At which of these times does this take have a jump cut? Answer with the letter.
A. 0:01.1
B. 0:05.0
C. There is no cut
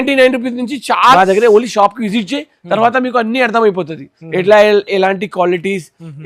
A